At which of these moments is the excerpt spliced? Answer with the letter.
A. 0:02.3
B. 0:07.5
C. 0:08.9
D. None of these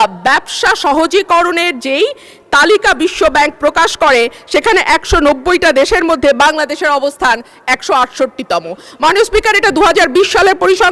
D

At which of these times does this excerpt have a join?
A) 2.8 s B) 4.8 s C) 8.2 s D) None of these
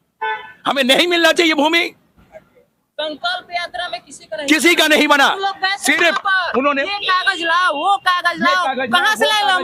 D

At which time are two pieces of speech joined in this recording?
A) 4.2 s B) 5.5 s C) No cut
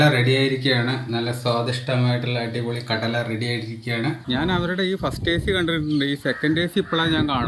A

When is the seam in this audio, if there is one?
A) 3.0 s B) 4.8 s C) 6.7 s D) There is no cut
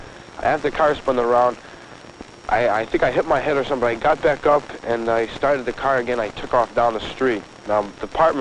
D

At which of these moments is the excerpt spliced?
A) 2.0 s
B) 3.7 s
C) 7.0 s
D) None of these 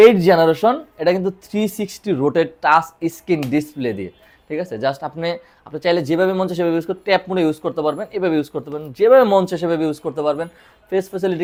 D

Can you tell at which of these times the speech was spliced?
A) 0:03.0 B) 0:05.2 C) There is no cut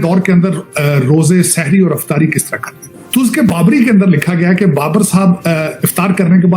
A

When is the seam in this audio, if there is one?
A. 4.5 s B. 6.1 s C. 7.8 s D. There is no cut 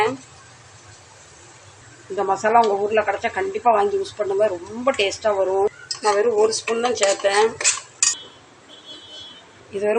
D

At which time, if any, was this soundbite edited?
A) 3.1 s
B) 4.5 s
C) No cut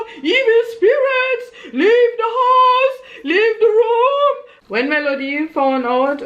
B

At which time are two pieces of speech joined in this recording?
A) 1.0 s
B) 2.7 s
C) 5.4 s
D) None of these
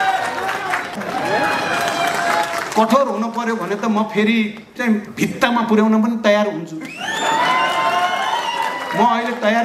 A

